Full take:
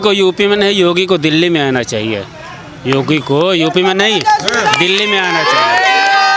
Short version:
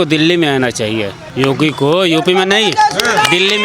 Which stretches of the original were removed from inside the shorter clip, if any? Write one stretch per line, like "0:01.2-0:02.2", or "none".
0:02.3-0:02.7

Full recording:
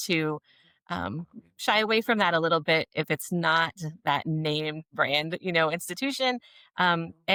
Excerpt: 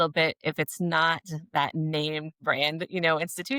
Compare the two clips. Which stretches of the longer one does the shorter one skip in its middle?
none

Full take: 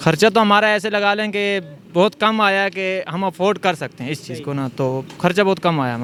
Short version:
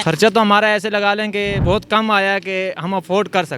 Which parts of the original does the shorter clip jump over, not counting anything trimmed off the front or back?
0:01.6-0:01.9

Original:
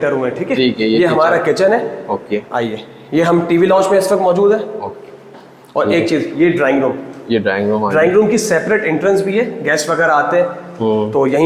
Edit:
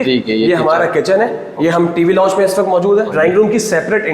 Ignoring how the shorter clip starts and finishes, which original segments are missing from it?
0:02.0-0:03.0
0:04.6-0:07.9

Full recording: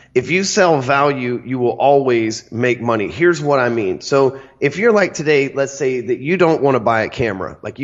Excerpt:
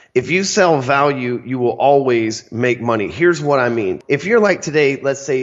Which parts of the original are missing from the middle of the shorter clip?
0:04.0-0:04.5

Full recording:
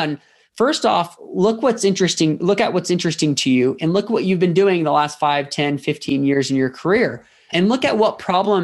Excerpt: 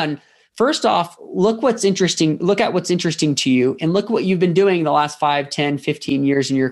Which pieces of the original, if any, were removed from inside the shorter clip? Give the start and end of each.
none

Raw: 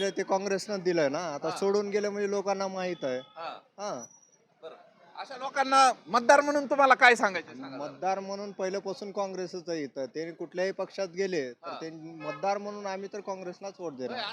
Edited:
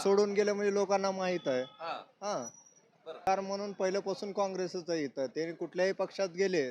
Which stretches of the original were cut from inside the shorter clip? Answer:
0:04.8-0:08.1

